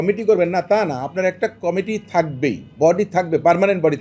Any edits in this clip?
no; 0 cuts

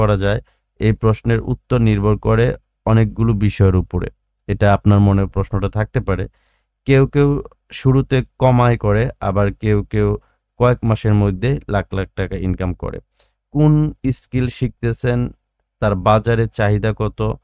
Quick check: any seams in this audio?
no; 0 cuts

